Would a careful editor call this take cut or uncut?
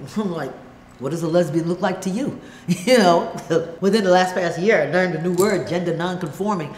cut